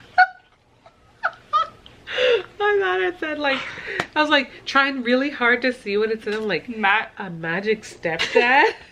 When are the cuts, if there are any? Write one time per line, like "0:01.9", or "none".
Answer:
none